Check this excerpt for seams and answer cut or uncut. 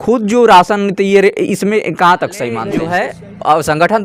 cut